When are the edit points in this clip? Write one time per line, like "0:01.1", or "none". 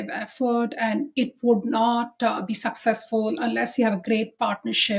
none